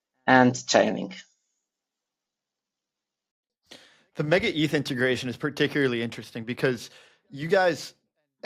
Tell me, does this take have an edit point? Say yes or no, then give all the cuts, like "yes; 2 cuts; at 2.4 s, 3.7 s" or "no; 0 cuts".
no; 0 cuts